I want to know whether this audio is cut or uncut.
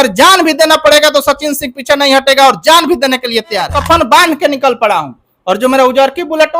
cut